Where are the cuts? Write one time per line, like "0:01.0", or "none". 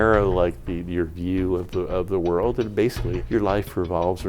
0:03.2